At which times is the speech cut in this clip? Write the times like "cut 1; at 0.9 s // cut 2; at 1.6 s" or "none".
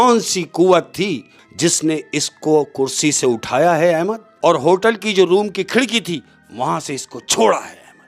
cut 1; at 1.4 s // cut 2; at 4.2 s